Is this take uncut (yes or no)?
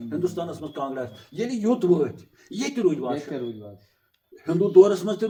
yes